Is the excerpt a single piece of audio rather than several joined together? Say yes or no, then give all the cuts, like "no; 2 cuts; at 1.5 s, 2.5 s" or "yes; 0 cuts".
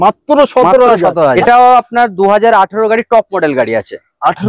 no; 1 cut; at 1.4 s